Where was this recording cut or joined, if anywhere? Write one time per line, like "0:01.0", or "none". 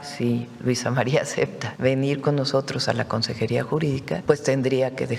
0:01.6
0:04.2